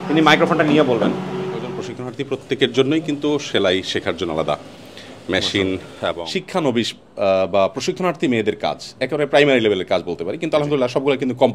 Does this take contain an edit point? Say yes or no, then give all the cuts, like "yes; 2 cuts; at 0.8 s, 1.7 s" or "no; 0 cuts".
yes; 2 cuts; at 1.8 s, 6.2 s